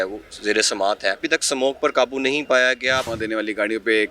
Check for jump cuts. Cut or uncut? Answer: cut